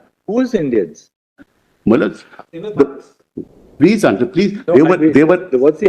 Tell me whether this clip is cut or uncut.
uncut